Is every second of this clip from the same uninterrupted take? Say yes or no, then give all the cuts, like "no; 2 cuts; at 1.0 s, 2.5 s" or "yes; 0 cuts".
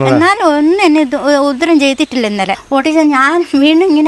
no; 1 cut; at 2.6 s